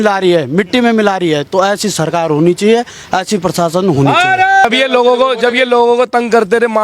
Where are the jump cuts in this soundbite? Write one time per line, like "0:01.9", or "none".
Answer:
0:04.6